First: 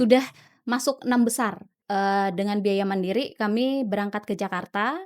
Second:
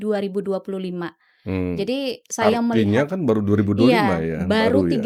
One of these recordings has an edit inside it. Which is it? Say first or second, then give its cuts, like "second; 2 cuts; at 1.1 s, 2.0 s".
first; 1 cut; at 1.8 s